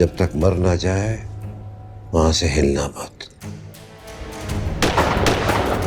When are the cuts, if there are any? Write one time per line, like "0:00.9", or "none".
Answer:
0:04.3

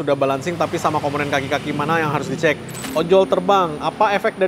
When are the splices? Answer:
0:02.7

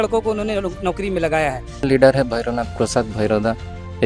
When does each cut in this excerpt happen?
0:01.9

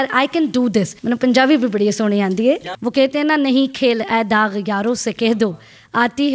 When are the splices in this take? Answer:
0:00.9
0:02.7

